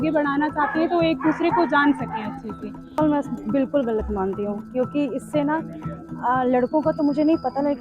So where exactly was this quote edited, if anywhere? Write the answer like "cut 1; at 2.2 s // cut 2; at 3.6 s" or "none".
cut 1; at 3.0 s